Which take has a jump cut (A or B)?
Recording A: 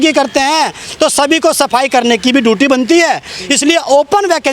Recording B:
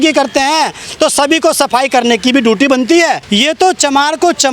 B